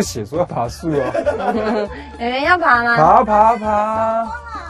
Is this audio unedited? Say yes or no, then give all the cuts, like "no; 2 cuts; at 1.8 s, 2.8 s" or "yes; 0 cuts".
yes; 0 cuts